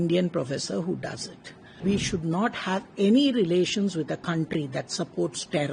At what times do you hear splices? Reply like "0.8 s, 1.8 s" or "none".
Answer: 1.8 s